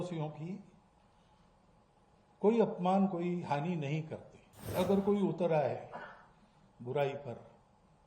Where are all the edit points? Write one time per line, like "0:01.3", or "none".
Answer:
0:04.7